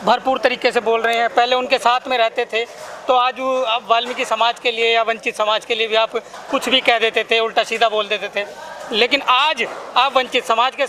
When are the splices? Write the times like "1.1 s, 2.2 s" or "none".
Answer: none